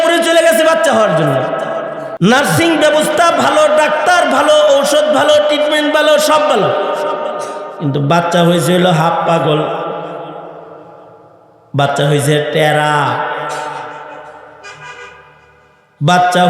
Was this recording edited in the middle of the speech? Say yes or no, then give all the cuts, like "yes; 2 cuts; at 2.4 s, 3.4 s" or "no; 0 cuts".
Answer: yes; 1 cut; at 2.0 s